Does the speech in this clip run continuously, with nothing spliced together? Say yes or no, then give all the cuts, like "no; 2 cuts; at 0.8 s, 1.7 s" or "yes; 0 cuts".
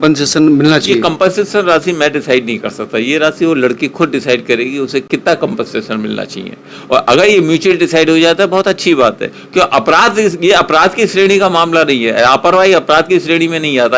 yes; 0 cuts